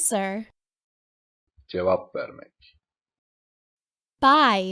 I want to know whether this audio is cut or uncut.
cut